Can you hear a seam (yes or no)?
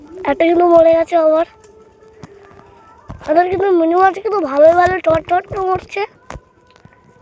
no